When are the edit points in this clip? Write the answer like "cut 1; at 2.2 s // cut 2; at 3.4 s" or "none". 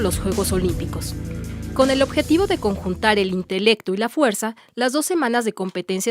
cut 1; at 5.1 s